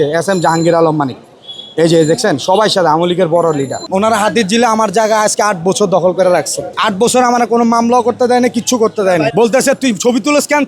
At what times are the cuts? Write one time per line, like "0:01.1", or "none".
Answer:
0:03.8
0:06.7
0:09.3

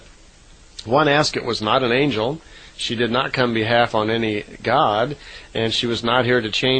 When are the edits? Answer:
0:02.4

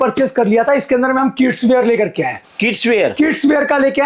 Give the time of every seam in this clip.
none

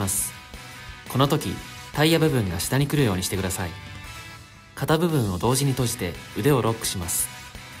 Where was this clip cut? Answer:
none

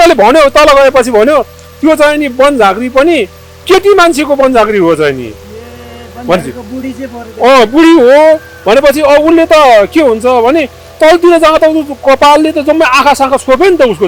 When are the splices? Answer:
none

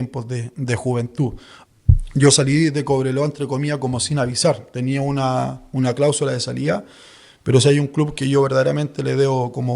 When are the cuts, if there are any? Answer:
0:01.5

